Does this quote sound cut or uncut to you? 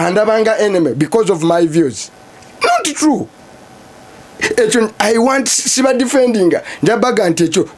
uncut